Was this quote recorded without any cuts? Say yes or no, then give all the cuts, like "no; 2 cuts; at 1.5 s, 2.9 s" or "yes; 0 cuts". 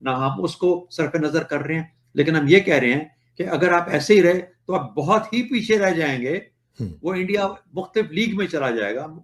yes; 0 cuts